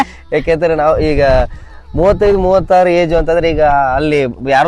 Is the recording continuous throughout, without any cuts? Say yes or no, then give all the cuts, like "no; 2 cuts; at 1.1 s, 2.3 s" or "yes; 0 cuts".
yes; 0 cuts